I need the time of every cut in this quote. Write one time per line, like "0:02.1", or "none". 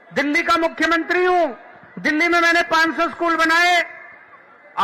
none